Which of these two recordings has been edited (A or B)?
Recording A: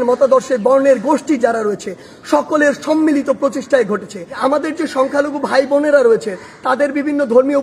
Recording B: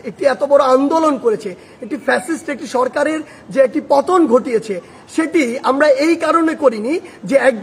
A